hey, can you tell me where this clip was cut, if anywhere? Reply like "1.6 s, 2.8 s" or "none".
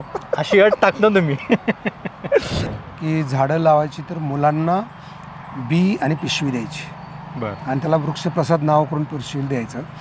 2.6 s